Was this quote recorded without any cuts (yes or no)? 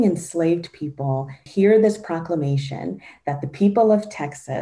no